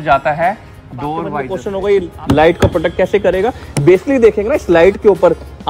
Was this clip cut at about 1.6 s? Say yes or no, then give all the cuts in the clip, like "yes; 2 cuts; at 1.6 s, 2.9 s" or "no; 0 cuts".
yes; 1 cut; at 1.6 s